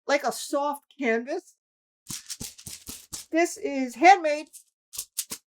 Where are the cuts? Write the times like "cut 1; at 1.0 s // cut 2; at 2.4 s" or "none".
cut 1; at 2.2 s